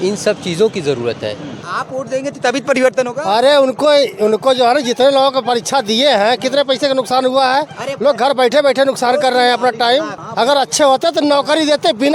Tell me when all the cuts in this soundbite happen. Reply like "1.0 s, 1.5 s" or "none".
1.7 s, 10.2 s